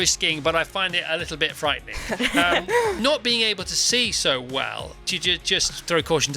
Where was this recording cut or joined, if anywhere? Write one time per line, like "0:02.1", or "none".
0:03.0
0:05.0